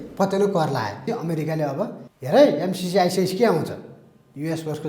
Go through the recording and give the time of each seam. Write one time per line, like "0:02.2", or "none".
0:01.1
0:02.1